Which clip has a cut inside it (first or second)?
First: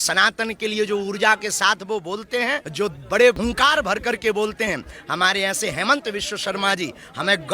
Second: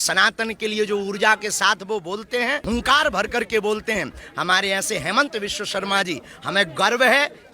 second